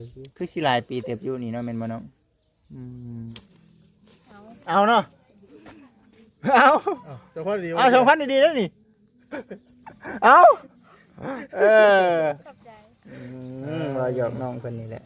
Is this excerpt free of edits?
no; 1 cut; at 3.3 s

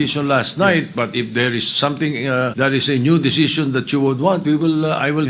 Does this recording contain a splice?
yes; 1 cut; at 2.5 s

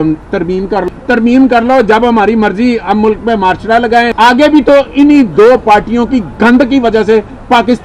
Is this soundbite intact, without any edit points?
no; 2 cuts; at 0.9 s, 4.1 s

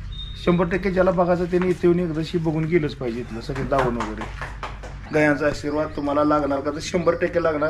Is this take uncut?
no; 1 cut; at 5.1 s

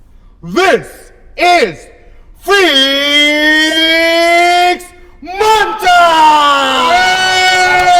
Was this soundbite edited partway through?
no; 0 cuts

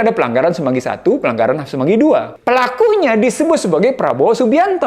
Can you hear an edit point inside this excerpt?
yes; 1 cut; at 2.3 s

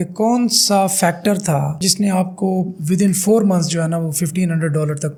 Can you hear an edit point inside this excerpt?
no; 0 cuts

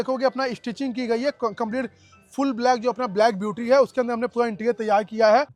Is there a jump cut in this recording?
no; 0 cuts

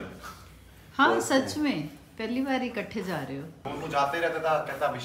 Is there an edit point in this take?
yes; 1 cut; at 3.5 s

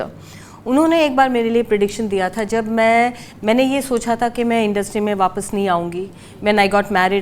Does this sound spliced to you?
no; 0 cuts

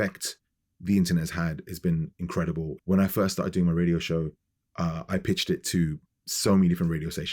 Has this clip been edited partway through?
yes; 1 cut; at 2.7 s

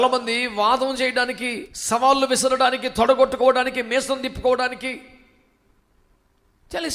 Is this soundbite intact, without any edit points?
no; 1 cut; at 1.7 s

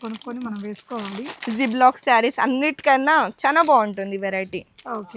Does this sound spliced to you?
no; 0 cuts

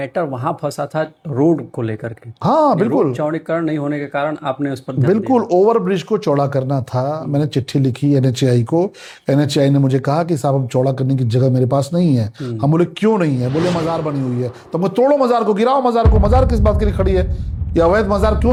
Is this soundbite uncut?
yes; 0 cuts

